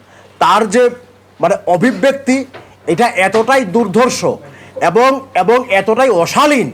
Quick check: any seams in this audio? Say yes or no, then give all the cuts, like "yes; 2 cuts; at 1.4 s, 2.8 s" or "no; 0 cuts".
no; 0 cuts